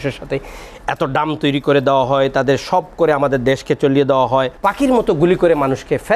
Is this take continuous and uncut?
no; 1 cut; at 4.5 s

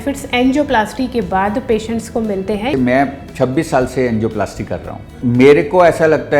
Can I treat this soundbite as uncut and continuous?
no; 2 cuts; at 2.7 s, 5.2 s

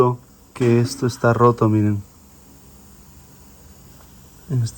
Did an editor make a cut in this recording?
yes; 1 cut; at 2.3 s

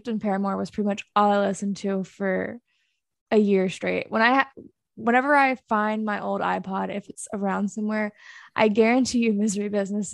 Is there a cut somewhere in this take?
no; 0 cuts

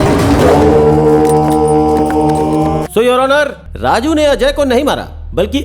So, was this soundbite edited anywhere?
yes; 2 cuts; at 2.9 s, 3.6 s

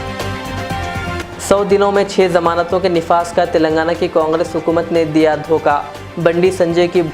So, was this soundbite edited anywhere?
yes; 1 cut; at 1.2 s

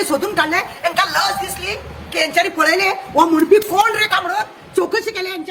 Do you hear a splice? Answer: no; 0 cuts

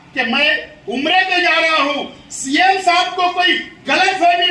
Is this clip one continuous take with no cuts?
yes; 0 cuts

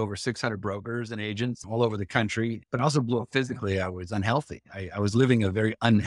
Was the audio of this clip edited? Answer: yes; 2 cuts; at 1.6 s, 2.6 s

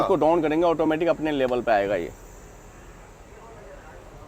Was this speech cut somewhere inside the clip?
no; 0 cuts

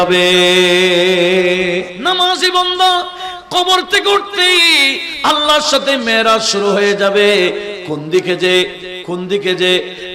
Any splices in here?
yes; 1 cut; at 1.9 s

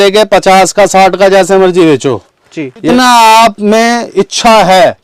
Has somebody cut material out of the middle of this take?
yes; 1 cut; at 2.9 s

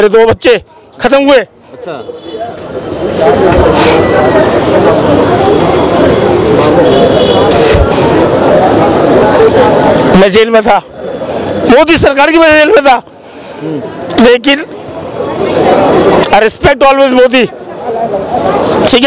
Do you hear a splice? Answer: no; 0 cuts

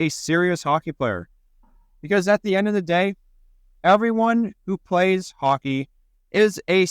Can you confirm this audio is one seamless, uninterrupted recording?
yes; 0 cuts

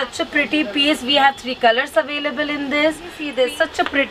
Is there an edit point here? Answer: yes; 1 cut; at 3.2 s

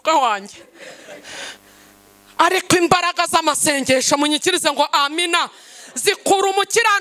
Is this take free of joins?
yes; 0 cuts

